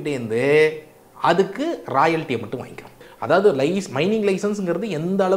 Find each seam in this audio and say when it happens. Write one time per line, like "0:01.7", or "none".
0:03.1